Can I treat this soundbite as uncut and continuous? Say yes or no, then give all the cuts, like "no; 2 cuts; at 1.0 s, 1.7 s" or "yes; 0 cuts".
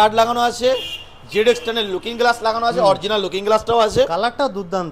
yes; 0 cuts